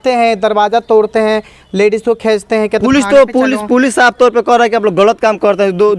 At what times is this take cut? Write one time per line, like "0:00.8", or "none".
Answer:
none